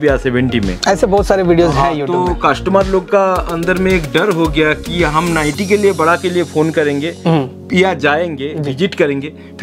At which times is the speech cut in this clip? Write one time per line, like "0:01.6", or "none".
none